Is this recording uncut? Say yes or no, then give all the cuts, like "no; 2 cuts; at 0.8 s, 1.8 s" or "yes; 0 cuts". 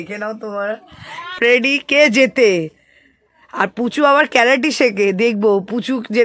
no; 1 cut; at 1.3 s